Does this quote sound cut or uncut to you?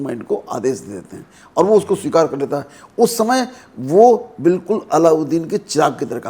uncut